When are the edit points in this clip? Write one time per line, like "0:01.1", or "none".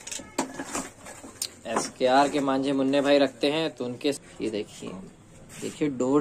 0:04.2